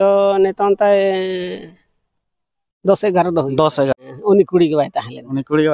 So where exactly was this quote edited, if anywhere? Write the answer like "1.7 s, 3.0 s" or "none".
3.9 s